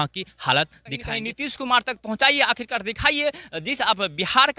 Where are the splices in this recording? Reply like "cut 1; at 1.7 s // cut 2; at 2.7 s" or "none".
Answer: cut 1; at 1.1 s